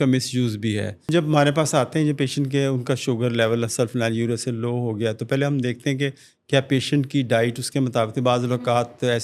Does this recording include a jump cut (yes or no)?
yes